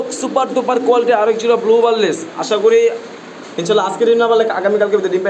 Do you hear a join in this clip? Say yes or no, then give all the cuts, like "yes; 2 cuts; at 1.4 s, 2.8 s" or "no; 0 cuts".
no; 0 cuts